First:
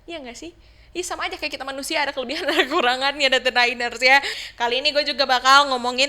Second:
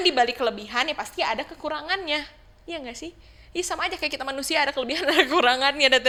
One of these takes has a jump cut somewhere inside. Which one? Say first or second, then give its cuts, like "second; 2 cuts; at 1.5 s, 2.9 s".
first; 1 cut; at 4.4 s